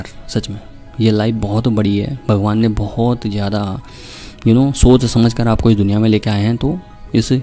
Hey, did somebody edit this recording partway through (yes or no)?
no